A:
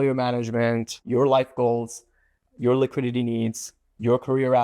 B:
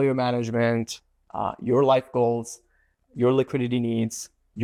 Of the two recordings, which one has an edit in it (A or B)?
A